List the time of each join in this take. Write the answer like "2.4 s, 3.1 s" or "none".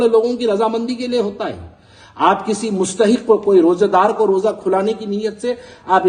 none